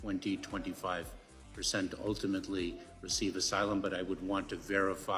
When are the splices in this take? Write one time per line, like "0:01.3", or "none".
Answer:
none